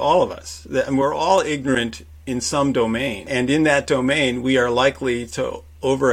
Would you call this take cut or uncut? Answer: cut